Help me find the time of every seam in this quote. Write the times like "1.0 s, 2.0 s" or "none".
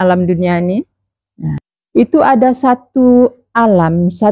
1.7 s